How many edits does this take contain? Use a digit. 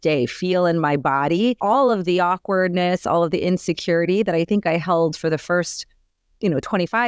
1